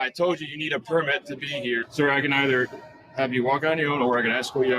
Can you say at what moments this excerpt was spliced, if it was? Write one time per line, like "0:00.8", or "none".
0:01.9